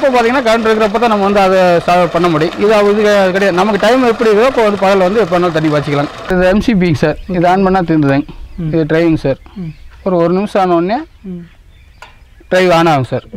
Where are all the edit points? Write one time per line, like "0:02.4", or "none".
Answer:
0:06.3